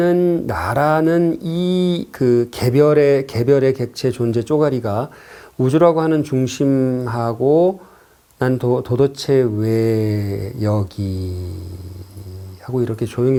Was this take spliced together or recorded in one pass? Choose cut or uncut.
uncut